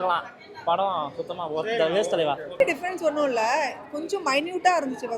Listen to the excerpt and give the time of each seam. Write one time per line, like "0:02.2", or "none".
0:02.6